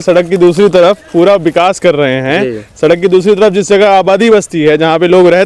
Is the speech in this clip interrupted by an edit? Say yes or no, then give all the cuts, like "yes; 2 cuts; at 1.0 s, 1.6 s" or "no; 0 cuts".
no; 0 cuts